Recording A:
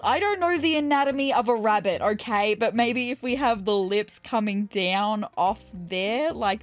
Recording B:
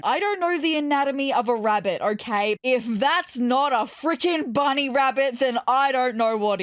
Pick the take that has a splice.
B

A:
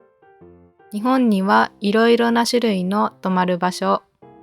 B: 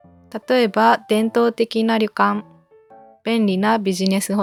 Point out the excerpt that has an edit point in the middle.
A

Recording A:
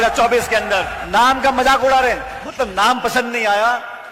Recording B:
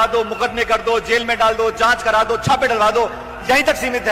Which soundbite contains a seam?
A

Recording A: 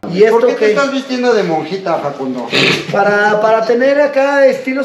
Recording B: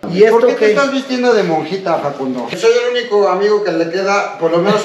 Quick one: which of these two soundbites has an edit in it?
B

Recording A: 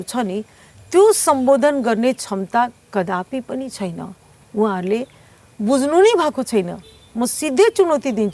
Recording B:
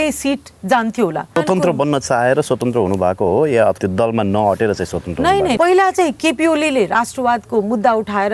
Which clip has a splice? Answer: B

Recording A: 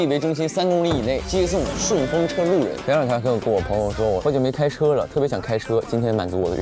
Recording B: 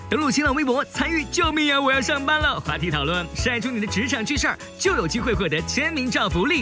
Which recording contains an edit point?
A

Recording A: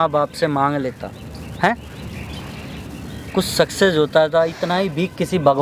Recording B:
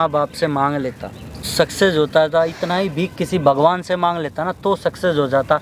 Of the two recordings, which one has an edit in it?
B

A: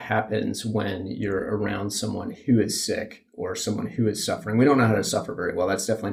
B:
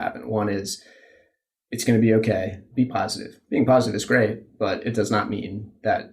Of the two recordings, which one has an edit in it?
B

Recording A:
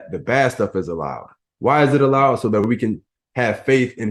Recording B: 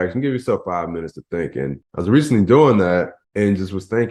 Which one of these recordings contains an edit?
B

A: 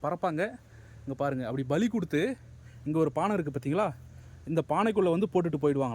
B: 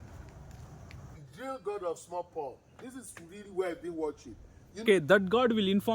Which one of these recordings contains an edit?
B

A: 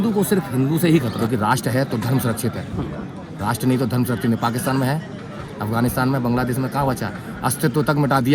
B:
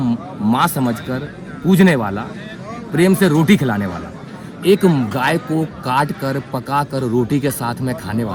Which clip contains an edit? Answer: A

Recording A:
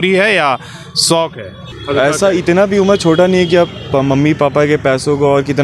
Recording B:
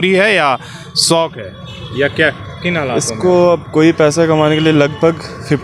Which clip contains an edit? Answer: A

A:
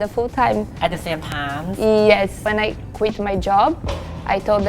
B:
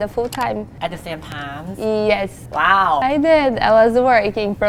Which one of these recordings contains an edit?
A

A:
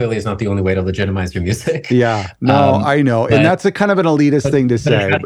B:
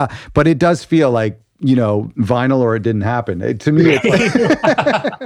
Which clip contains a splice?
B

